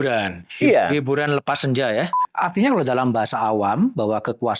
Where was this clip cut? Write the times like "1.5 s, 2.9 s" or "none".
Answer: 2.2 s